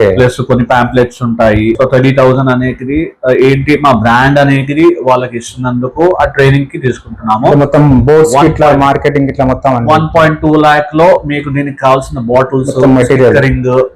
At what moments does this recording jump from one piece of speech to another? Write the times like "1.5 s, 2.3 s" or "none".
1.8 s